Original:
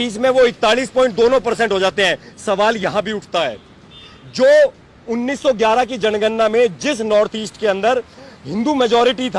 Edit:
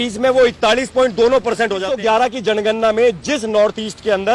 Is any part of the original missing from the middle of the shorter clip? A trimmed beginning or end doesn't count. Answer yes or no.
yes